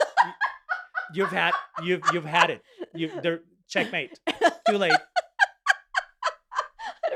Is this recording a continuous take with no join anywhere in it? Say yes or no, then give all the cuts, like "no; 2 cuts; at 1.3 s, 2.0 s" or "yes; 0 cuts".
yes; 0 cuts